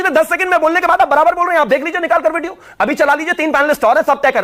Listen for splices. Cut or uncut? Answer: uncut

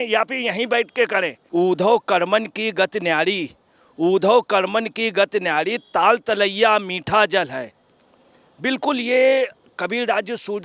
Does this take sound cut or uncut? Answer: cut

